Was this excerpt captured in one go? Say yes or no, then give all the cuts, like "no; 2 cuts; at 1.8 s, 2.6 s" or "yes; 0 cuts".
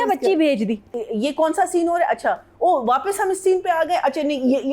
no; 1 cut; at 0.9 s